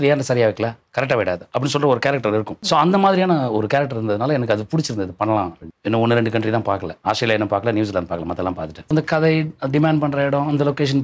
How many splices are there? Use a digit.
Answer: 4